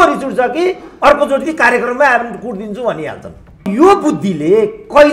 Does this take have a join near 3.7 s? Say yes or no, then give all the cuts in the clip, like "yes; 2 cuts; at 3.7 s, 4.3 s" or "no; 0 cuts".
yes; 1 cut; at 3.7 s